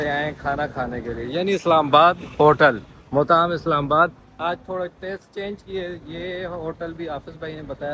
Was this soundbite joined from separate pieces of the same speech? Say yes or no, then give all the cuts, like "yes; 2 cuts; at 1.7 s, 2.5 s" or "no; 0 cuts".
no; 0 cuts